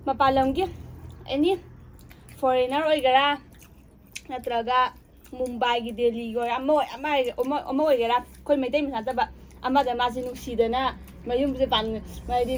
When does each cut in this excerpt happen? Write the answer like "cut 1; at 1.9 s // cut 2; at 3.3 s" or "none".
none